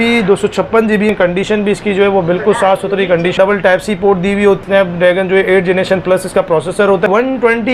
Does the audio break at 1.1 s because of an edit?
yes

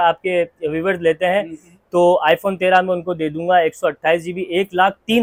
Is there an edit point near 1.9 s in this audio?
no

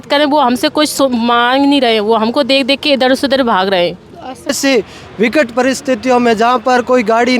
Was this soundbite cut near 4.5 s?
yes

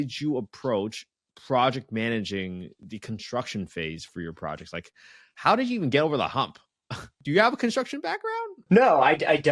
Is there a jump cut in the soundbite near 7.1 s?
yes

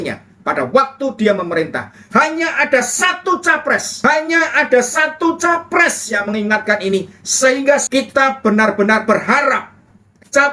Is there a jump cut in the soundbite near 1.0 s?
no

